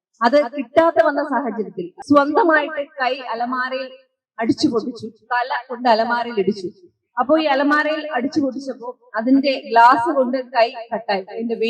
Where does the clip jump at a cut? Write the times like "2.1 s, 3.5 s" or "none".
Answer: 1.9 s